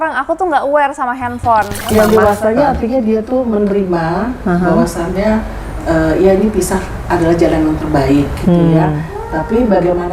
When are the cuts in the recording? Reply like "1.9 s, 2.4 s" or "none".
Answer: 1.9 s